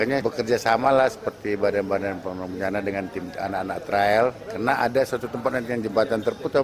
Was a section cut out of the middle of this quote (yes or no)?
no